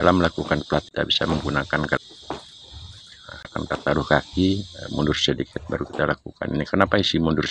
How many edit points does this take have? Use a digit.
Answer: 3